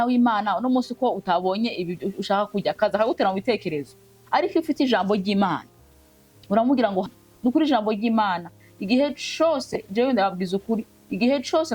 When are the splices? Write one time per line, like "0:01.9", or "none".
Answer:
0:07.1